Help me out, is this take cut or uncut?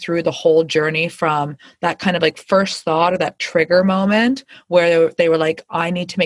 uncut